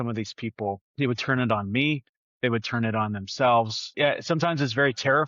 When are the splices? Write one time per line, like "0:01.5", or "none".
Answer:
0:00.9
0:03.8